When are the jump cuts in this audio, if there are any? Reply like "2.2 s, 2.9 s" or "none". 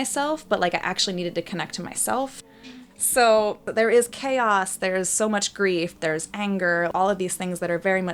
2.5 s, 3.6 s